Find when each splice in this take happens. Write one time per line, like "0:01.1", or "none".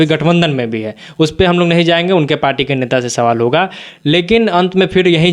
none